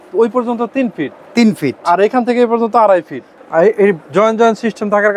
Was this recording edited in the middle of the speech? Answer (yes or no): yes